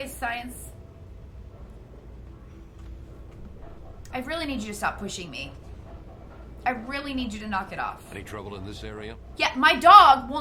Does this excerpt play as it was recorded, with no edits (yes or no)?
yes